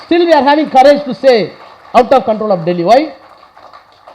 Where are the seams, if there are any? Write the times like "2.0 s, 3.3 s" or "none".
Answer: none